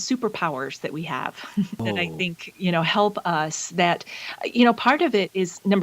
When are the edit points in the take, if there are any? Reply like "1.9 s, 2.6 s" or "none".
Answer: 1.8 s